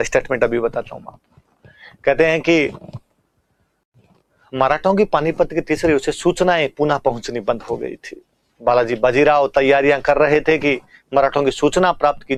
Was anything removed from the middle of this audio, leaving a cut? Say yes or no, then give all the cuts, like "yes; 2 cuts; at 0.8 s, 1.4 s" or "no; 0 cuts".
no; 0 cuts